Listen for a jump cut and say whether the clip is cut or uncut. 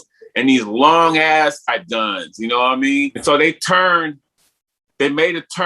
cut